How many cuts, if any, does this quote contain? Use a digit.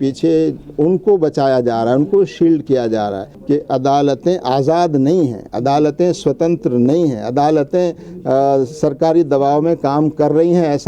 1